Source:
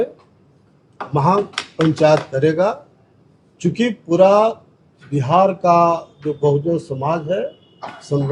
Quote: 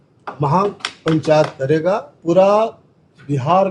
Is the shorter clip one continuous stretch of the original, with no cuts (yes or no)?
no